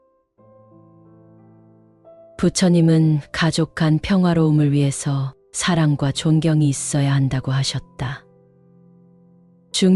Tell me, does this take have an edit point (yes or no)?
no